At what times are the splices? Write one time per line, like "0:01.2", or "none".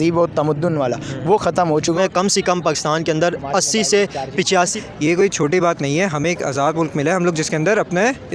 0:02.0
0:04.8